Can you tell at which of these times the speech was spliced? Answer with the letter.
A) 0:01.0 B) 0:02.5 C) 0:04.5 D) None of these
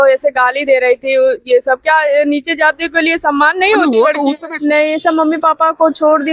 C